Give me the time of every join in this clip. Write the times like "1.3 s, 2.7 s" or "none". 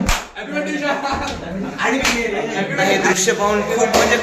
2.9 s